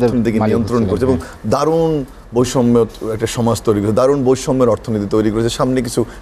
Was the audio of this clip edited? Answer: no; 0 cuts

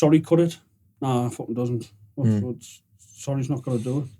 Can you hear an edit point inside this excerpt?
no; 0 cuts

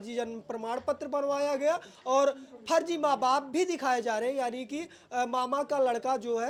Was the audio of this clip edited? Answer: no; 0 cuts

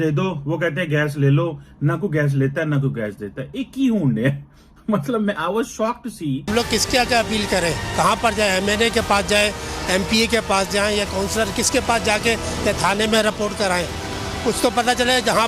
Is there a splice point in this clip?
yes; 1 cut; at 6.5 s

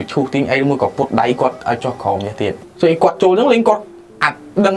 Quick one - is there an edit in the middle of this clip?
yes; 1 cut; at 2.7 s

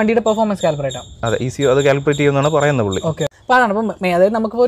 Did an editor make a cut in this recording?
yes; 1 cut; at 3.3 s

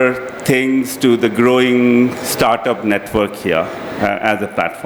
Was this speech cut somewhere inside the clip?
no; 0 cuts

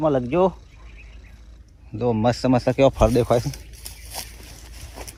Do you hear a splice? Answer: no; 0 cuts

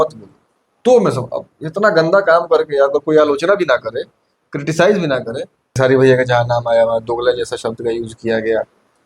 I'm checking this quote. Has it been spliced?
yes; 1 cut; at 5.8 s

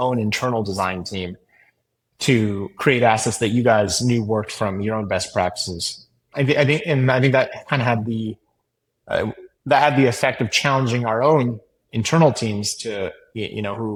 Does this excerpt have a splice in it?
no; 0 cuts

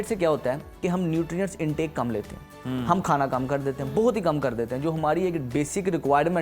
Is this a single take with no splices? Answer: yes; 0 cuts

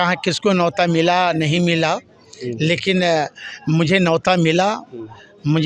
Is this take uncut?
yes; 0 cuts

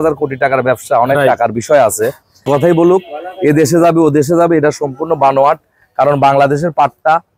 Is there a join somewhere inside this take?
yes; 1 cut; at 2.5 s

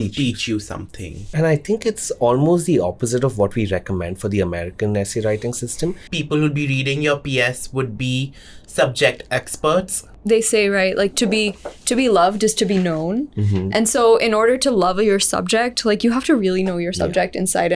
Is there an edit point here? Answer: yes; 3 cuts; at 1.2 s, 6.1 s, 10.1 s

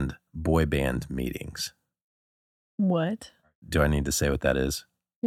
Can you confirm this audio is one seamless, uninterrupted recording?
no; 1 cut; at 3.4 s

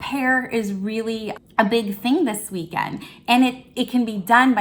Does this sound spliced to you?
yes; 1 cut; at 1.3 s

